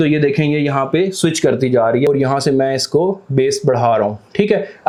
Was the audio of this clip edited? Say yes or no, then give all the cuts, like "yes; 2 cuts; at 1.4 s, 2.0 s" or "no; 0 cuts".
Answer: no; 0 cuts